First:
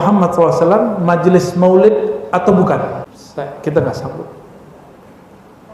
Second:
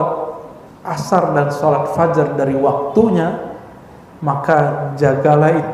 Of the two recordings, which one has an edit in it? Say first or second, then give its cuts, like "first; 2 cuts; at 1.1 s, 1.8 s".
first; 1 cut; at 3.2 s